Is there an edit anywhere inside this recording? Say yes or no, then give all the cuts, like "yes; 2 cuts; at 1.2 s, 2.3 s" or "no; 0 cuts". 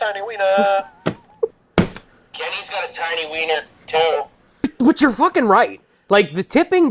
yes; 2 cuts; at 1.6 s, 4.7 s